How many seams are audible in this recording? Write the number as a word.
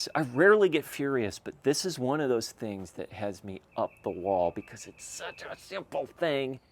zero